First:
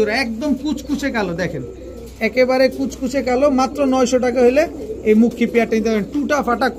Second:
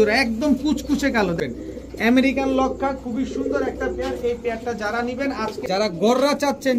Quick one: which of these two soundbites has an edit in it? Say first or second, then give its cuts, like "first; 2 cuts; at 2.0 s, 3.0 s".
second; 2 cuts; at 1.4 s, 5.6 s